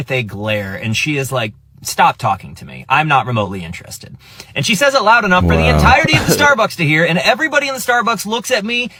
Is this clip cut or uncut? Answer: uncut